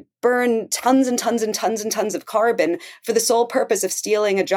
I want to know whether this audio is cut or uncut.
uncut